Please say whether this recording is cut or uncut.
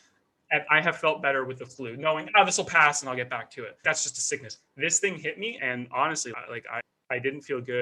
cut